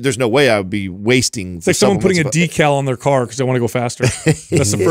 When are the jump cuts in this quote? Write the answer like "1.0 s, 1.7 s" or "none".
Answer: none